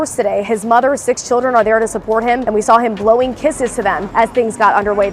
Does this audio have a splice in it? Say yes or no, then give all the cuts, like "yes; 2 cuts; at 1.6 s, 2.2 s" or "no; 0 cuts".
yes; 2 cuts; at 2.4 s, 4.0 s